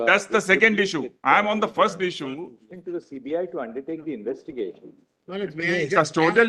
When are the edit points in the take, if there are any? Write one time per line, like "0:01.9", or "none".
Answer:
0:02.6